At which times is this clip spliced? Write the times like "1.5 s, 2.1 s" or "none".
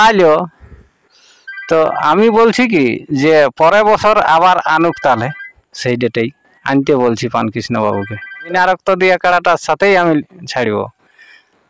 8.5 s